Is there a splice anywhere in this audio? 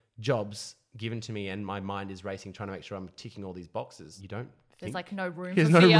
yes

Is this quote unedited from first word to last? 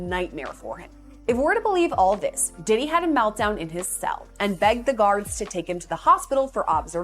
yes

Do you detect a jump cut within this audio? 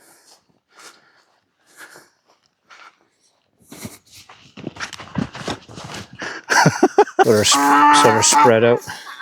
yes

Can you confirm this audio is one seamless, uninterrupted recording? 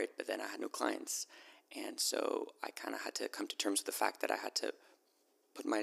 yes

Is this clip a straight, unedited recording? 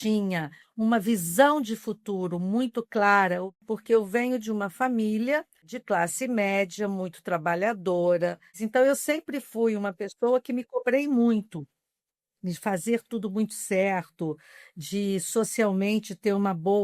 no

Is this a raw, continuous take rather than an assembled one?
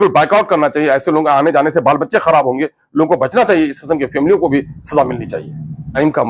yes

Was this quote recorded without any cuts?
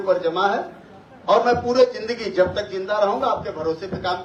yes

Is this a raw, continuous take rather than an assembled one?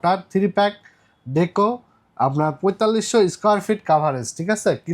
yes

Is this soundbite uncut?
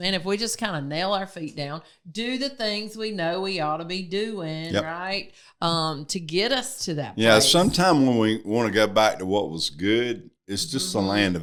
yes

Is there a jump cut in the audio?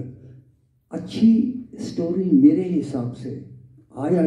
no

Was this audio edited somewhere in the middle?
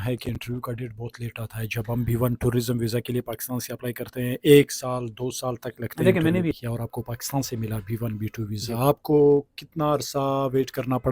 yes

